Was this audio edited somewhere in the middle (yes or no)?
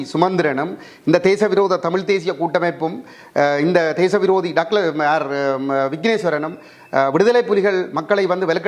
no